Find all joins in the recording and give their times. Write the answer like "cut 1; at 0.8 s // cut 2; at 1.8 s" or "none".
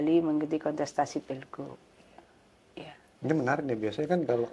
none